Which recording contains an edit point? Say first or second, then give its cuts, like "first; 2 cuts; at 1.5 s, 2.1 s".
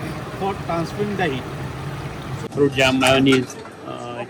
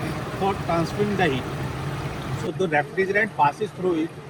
first; 1 cut; at 2.5 s